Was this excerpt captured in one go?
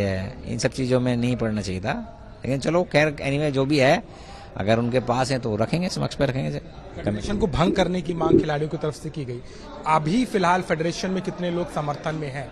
yes; 0 cuts

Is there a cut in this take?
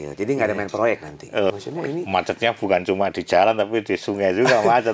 yes; 1 cut; at 1.5 s

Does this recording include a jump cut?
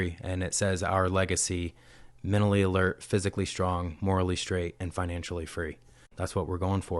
yes; 1 cut; at 6.1 s

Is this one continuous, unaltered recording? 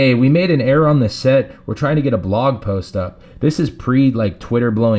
yes; 0 cuts

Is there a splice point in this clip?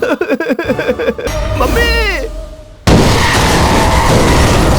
yes; 2 cuts; at 1.2 s, 2.9 s

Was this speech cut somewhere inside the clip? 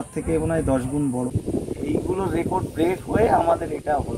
yes; 1 cut; at 1.3 s

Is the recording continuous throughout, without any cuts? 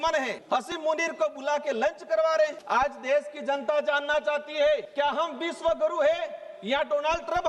no; 1 cut; at 2.6 s

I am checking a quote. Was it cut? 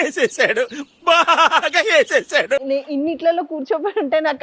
yes; 1 cut; at 2.6 s

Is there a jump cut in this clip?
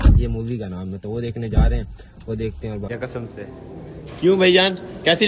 yes; 2 cuts; at 1.1 s, 2.9 s

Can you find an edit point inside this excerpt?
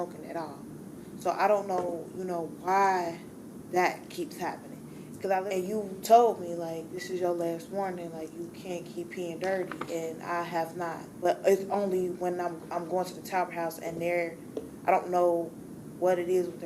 yes; 1 cut; at 5.5 s

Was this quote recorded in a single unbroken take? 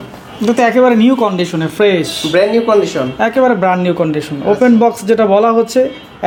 yes; 0 cuts

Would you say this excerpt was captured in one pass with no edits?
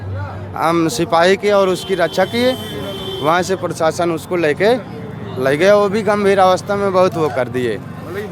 yes; 0 cuts

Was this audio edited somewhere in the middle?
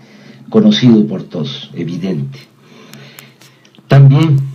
no; 0 cuts

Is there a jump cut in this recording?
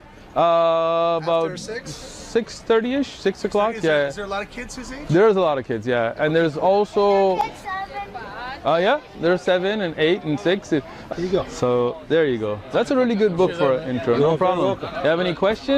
yes; 1 cut; at 11.0 s

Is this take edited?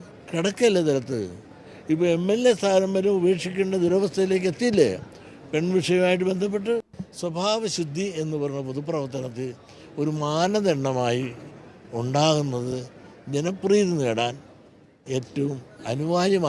yes; 1 cut; at 7.0 s

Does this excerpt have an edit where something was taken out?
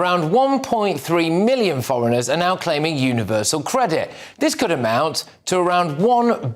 no; 0 cuts

